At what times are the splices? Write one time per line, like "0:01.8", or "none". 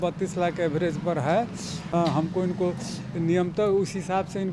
0:01.8